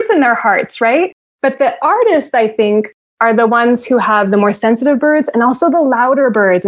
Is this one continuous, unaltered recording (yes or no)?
yes